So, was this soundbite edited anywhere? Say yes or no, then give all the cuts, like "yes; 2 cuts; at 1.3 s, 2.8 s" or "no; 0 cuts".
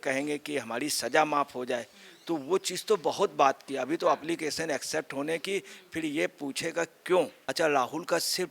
yes; 1 cut; at 7.4 s